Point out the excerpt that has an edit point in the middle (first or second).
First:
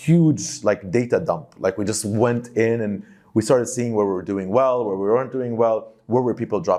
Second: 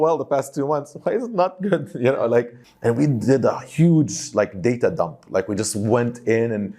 second